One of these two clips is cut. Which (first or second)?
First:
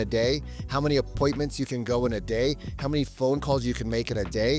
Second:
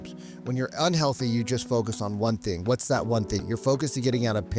second